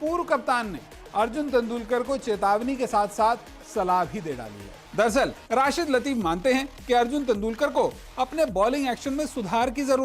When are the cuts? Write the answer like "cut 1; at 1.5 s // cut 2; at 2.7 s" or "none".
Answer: cut 1; at 4.8 s